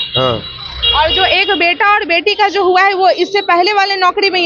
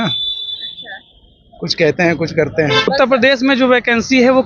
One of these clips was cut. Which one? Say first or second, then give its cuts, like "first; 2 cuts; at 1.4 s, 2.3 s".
second; 1 cut; at 2.8 s